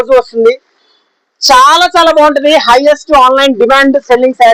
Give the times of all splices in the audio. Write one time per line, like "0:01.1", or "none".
none